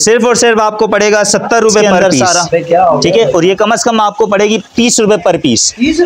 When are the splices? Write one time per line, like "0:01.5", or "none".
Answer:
0:03.0